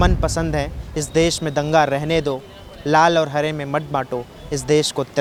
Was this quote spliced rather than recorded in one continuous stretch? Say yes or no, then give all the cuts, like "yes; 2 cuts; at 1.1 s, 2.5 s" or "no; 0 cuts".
no; 0 cuts